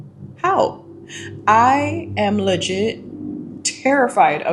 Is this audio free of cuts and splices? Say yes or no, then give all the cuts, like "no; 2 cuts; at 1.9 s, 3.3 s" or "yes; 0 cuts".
yes; 0 cuts